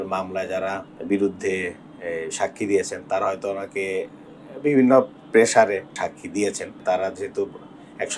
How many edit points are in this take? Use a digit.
3